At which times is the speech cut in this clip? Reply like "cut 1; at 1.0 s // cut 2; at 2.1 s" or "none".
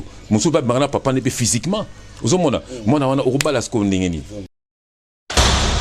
cut 1; at 4.4 s